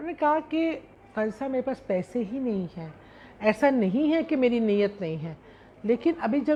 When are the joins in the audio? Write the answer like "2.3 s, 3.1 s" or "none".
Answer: none